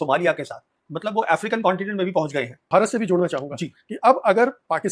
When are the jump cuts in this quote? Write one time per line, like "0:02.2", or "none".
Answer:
0:02.7